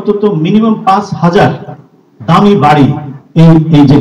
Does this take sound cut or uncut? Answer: uncut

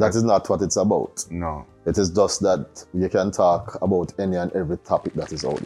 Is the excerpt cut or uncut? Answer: uncut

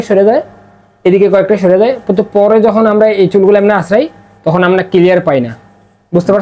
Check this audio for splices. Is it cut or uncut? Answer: uncut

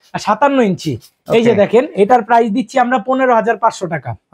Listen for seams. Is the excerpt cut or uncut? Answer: uncut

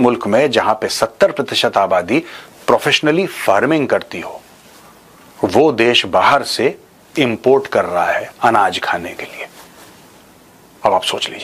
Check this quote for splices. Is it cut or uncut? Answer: uncut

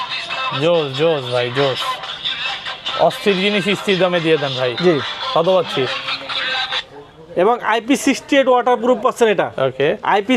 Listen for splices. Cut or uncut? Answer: uncut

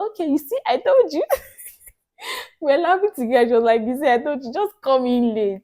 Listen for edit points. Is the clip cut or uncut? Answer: uncut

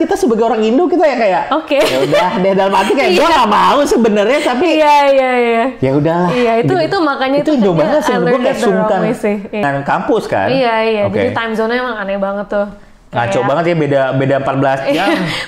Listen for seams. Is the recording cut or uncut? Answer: cut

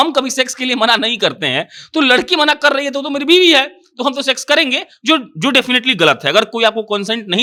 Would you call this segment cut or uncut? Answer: uncut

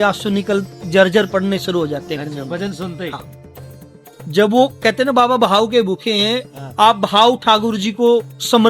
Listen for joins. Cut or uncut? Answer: uncut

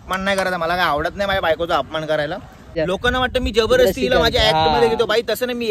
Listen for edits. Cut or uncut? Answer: cut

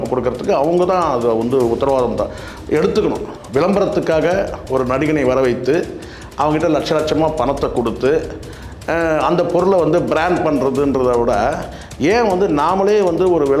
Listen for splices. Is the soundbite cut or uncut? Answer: cut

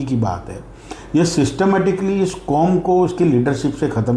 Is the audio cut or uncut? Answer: uncut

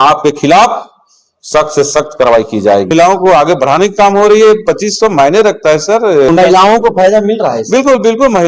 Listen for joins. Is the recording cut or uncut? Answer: cut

